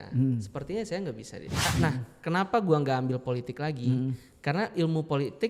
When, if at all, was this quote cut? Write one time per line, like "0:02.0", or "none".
0:01.7